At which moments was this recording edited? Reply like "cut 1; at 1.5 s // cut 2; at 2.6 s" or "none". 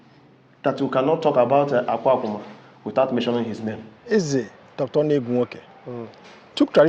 cut 1; at 3.9 s